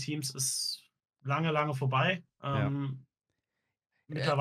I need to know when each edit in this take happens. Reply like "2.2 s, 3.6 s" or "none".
none